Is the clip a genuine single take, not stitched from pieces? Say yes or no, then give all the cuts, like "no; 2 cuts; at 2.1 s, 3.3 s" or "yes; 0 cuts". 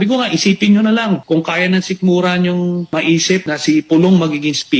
no; 2 cuts; at 1.2 s, 3.3 s